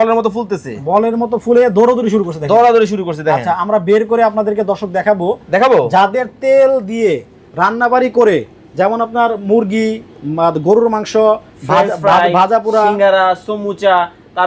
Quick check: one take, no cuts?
yes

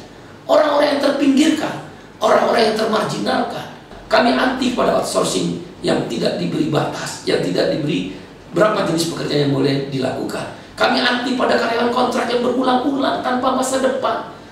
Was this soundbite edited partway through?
yes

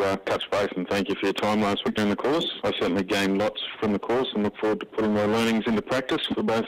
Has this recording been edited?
yes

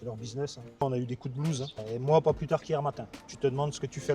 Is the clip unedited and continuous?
no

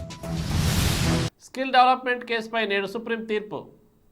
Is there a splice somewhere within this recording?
yes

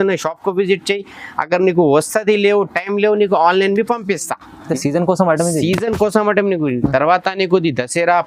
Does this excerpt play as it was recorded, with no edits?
no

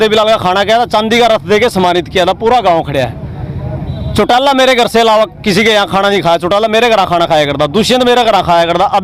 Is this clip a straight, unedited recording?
yes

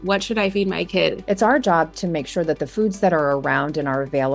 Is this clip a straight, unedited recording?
no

